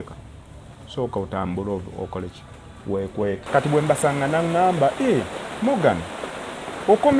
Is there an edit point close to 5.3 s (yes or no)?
no